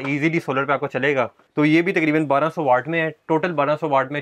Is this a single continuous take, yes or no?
no